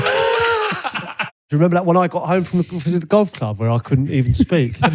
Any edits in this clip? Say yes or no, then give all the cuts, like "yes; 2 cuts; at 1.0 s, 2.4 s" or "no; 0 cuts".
yes; 1 cut; at 1.4 s